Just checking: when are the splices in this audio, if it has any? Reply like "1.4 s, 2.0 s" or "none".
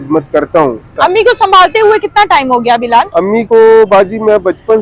0.9 s, 3.1 s